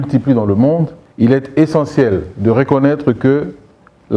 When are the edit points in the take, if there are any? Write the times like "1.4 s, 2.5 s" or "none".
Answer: 1.0 s